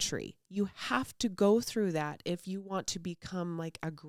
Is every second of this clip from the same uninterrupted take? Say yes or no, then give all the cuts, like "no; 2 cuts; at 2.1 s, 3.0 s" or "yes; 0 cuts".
yes; 0 cuts